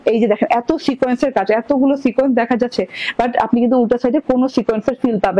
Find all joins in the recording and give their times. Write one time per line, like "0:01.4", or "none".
none